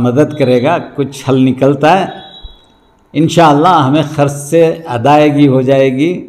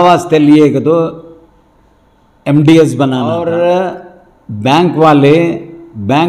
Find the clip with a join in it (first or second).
second